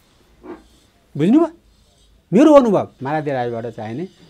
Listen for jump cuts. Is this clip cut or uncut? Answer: cut